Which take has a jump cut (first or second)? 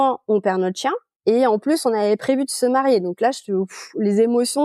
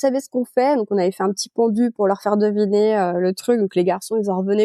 first